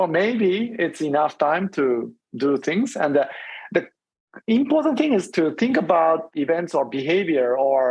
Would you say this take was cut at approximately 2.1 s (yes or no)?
no